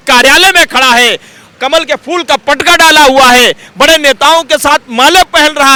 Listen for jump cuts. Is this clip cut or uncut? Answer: uncut